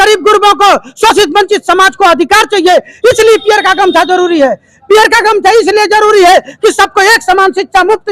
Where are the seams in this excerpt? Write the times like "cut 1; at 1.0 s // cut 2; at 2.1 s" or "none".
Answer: none